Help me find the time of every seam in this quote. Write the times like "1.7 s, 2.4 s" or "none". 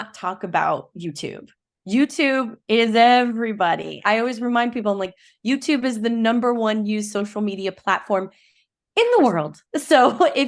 none